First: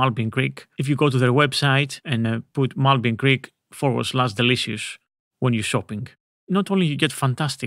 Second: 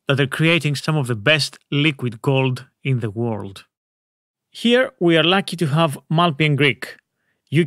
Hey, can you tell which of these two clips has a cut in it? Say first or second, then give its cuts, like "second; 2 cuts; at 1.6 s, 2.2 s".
first; 2 cuts; at 2.1 s, 6.5 s